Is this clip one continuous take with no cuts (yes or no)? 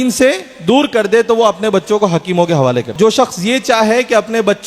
no